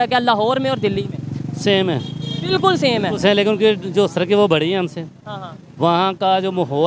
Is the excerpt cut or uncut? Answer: uncut